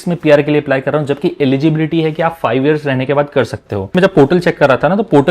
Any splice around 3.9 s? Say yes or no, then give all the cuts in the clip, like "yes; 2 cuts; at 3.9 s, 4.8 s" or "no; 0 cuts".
yes; 1 cut; at 3.9 s